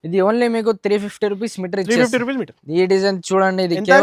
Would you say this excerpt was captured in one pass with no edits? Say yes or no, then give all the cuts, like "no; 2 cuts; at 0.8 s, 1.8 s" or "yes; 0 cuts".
no; 1 cut; at 2.6 s